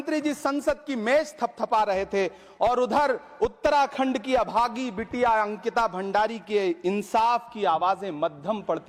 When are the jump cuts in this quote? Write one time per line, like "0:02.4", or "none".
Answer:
none